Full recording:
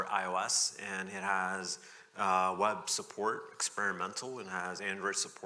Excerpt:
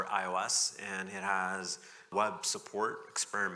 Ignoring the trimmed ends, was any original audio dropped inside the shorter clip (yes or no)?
yes